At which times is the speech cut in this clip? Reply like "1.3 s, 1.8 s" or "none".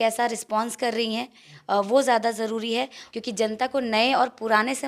3.0 s